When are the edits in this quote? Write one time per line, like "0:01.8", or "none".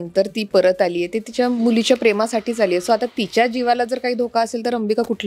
none